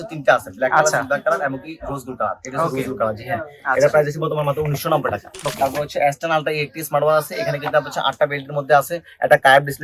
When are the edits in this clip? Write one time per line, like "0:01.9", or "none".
0:05.5